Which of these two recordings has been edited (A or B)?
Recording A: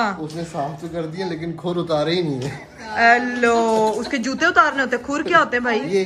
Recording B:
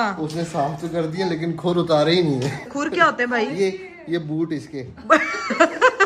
B